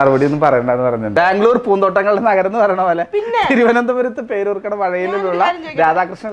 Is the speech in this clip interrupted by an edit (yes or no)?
yes